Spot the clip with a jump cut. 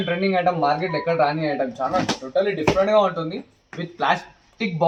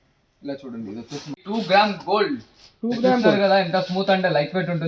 second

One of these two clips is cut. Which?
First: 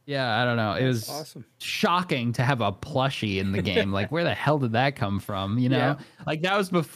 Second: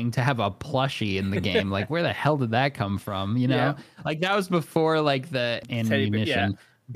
second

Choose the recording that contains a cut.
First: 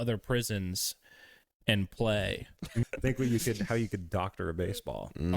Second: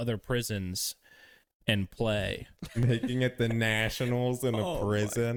first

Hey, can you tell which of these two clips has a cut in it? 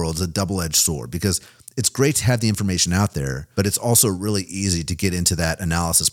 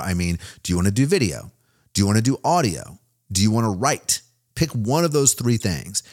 first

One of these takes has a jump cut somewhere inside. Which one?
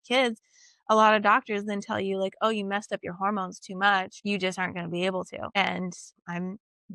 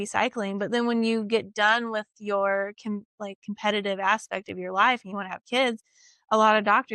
first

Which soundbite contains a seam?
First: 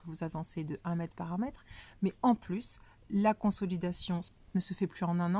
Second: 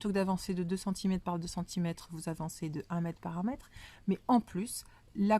first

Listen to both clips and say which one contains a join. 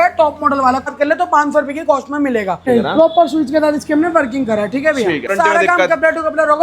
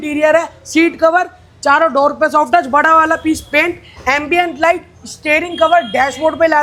first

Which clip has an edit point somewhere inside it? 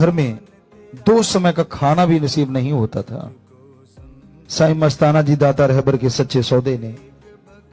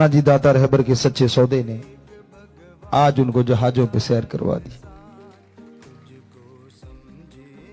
second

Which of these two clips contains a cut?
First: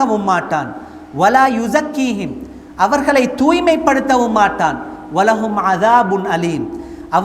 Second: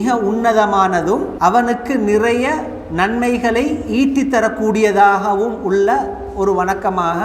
second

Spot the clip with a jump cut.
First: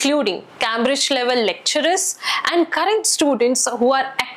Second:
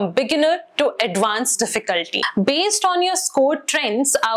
second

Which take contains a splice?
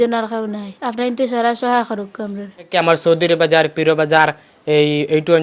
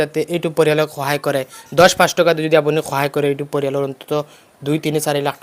first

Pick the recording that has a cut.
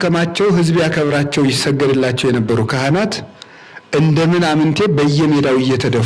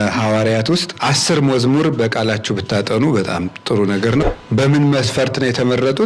second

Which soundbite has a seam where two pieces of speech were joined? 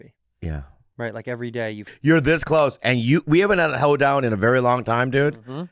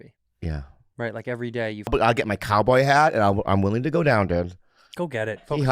second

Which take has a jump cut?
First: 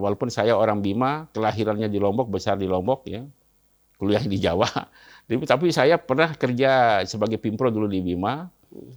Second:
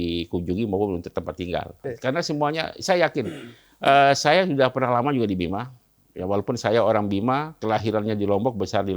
second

